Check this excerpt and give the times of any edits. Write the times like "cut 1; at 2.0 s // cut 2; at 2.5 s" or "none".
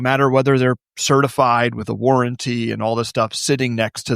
cut 1; at 0.9 s